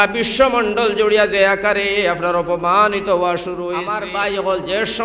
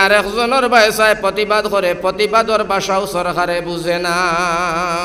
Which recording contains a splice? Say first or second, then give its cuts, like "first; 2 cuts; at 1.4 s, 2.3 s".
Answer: first; 1 cut; at 4.0 s